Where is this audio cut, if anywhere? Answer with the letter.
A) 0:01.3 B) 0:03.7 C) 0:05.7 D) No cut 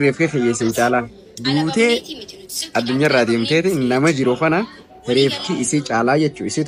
D